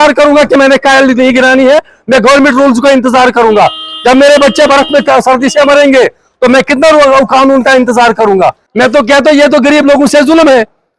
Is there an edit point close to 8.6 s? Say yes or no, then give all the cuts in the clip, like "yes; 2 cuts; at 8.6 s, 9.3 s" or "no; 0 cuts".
yes; 1 cut; at 8.6 s